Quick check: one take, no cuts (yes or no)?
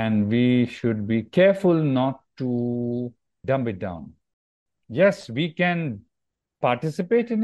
no